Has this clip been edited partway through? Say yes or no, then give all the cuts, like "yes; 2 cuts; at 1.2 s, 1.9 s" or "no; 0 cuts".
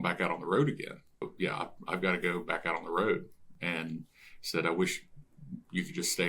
yes; 2 cuts; at 1.3 s, 3.4 s